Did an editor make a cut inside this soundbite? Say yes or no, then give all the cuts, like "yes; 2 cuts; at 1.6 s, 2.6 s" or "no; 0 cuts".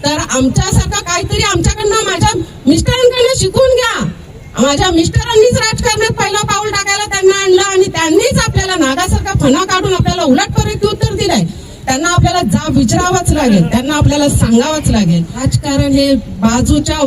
yes; 1 cut; at 15.5 s